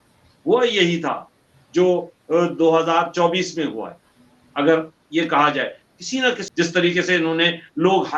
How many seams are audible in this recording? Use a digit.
1